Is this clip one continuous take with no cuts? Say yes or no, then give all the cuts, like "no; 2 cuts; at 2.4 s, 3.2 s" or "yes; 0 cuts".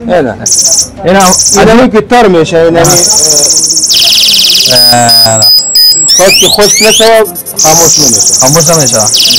yes; 0 cuts